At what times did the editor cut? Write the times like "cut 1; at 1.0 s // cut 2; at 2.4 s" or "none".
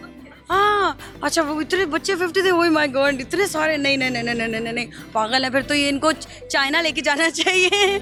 none